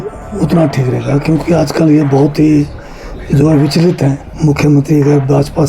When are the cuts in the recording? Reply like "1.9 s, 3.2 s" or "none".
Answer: 4.3 s